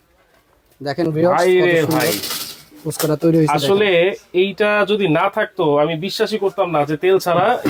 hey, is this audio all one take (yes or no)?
yes